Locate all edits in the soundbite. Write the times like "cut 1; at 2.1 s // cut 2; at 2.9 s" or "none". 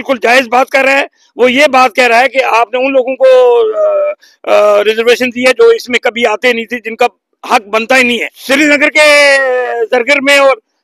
cut 1; at 8.4 s

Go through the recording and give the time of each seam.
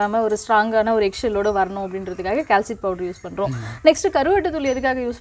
none

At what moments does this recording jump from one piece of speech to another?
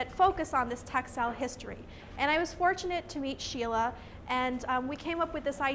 cut 1; at 4.6 s

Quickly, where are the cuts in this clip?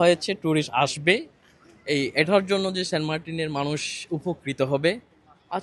none

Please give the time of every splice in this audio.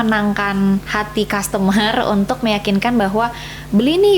cut 1; at 1.0 s

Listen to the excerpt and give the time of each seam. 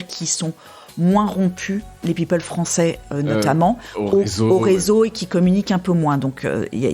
none

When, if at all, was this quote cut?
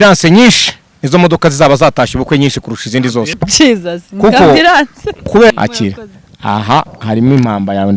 cut 1; at 3.4 s // cut 2; at 5.5 s

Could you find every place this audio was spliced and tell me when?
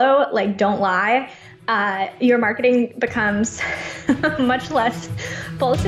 none

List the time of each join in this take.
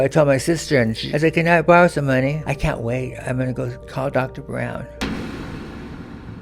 cut 1; at 1.0 s // cut 2; at 2.5 s // cut 3; at 3.8 s // cut 4; at 4.9 s

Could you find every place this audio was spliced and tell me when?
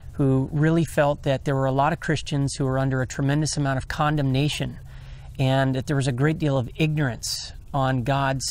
cut 1; at 2.5 s

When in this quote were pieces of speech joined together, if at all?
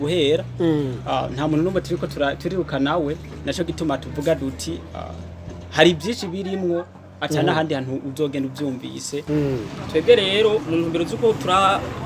cut 1; at 9.2 s

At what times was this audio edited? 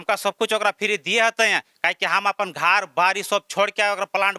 none

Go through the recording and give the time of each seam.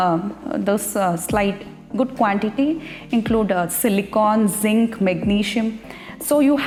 none

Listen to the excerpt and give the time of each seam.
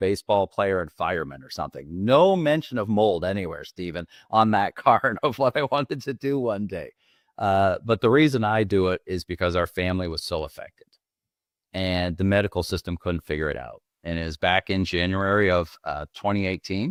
none

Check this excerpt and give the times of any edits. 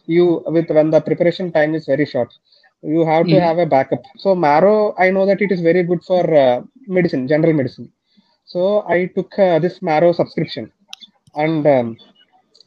cut 1; at 4.1 s

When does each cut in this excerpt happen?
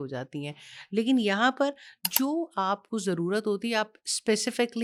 none

